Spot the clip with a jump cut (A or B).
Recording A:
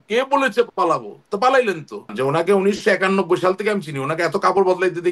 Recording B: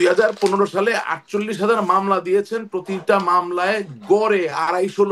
A